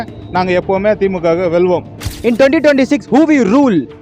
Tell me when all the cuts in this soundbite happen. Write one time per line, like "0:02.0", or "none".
0:02.1

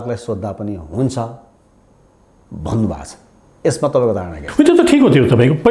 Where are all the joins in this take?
none

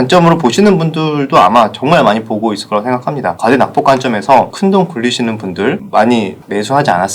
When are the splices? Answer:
0:03.4
0:04.5
0:05.8

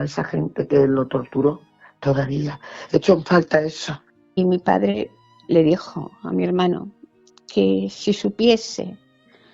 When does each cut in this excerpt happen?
0:04.4

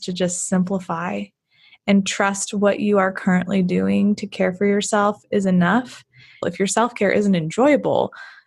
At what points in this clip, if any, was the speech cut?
0:06.5

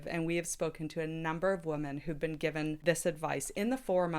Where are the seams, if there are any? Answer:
0:02.8

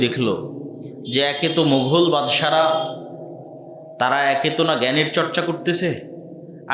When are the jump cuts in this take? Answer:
none

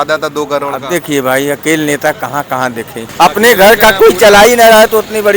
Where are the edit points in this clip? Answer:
0:03.0

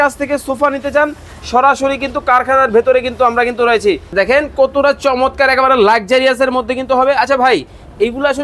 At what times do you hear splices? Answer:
0:04.1

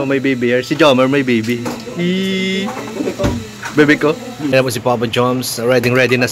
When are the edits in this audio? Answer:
0:04.5

